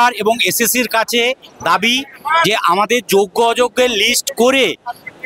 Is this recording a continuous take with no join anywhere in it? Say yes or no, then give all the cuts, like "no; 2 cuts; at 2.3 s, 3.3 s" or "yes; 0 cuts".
yes; 0 cuts